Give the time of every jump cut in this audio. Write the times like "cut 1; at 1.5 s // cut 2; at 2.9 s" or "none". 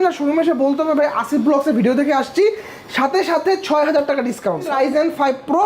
cut 1; at 4.7 s